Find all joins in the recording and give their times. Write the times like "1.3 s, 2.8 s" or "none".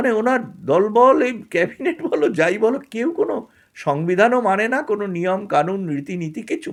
none